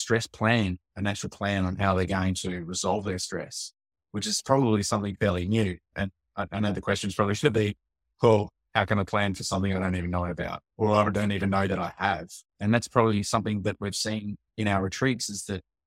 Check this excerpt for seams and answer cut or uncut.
uncut